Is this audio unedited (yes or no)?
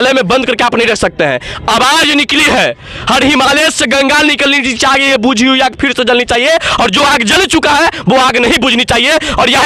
yes